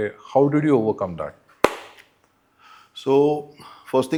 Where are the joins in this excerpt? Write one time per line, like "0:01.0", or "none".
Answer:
none